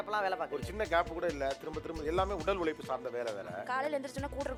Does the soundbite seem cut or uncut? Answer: uncut